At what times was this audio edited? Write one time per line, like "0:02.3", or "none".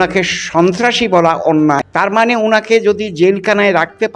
0:02.1